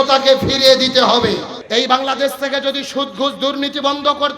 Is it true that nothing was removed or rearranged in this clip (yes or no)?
no